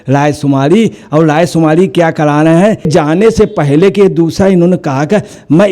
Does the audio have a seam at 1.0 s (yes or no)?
no